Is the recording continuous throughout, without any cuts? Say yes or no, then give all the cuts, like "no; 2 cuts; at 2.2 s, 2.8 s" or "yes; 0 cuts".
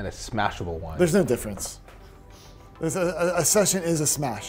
yes; 0 cuts